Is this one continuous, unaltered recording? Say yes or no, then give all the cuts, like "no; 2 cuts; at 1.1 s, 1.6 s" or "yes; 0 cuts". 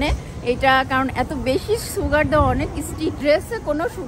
no; 1 cut; at 3.2 s